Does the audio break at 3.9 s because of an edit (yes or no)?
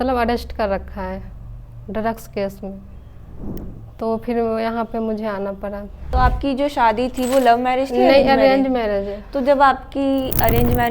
no